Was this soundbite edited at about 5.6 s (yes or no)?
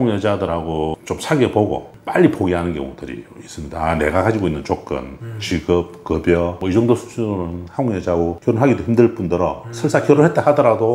no